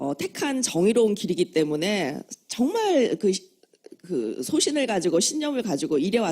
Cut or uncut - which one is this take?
cut